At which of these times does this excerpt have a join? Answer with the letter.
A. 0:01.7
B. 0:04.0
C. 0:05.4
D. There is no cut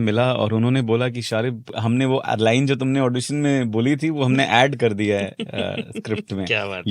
A